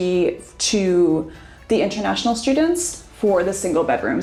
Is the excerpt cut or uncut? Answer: uncut